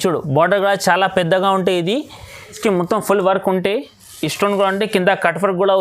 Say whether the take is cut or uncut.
cut